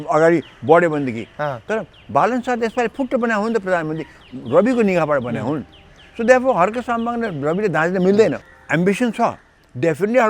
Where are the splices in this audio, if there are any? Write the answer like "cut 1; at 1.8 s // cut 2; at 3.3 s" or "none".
cut 1; at 8.4 s